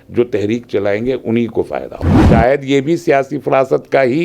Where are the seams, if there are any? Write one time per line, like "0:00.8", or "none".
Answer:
0:02.2